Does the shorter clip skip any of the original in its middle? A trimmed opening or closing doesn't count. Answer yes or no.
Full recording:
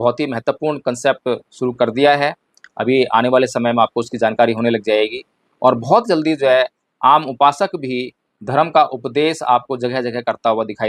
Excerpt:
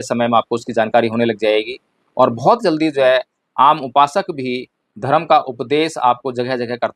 no